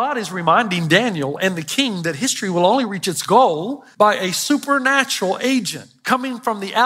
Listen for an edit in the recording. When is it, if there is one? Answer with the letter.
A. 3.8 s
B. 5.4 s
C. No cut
A